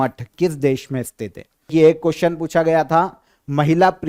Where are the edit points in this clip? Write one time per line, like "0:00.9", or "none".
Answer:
0:01.7